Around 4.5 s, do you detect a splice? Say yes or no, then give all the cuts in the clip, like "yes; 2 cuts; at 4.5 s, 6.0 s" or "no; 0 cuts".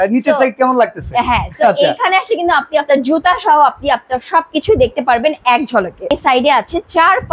no; 1 cut; at 6.1 s